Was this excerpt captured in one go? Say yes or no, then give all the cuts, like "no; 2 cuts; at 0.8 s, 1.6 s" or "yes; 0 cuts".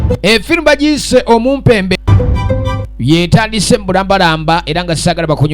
no; 1 cut; at 2.0 s